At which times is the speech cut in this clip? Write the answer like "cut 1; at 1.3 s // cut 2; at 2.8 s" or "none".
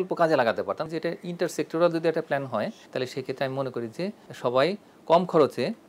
cut 1; at 0.9 s // cut 2; at 4.3 s